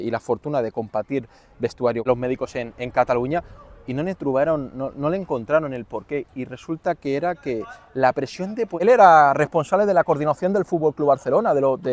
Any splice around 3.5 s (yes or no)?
no